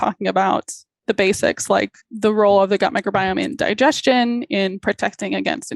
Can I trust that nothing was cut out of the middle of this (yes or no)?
no